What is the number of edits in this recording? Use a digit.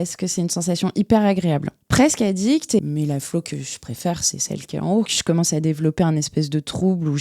3